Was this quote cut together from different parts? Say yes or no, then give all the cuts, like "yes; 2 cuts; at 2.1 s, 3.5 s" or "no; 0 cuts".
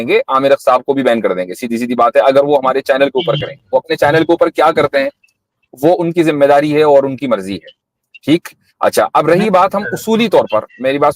no; 0 cuts